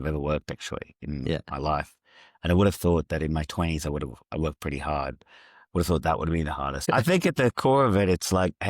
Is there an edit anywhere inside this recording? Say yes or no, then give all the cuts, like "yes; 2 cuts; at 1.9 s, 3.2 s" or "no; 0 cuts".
yes; 1 cut; at 6.8 s